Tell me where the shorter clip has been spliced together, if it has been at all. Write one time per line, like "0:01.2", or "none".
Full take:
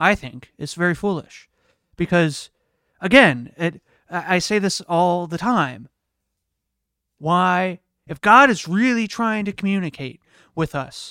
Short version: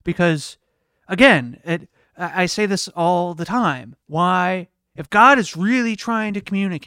0:03.9